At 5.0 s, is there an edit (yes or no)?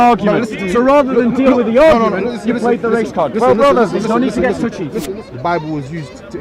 yes